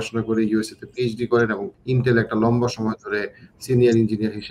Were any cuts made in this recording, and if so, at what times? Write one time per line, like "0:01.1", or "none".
0:01.7